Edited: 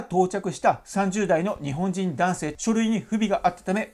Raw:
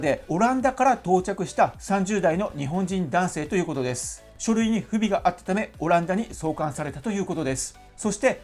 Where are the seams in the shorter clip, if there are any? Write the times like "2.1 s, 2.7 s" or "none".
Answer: 2.5 s